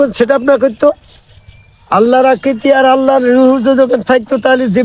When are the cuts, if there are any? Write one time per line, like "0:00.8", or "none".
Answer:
none